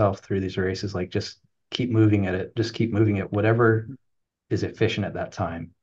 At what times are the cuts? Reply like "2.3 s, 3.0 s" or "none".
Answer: none